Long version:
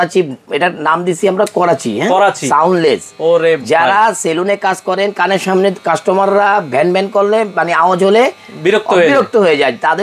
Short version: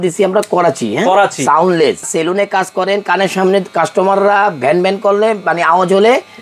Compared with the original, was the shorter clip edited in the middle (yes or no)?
yes